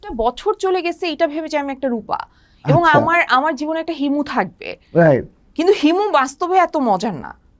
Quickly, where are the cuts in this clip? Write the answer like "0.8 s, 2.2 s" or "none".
none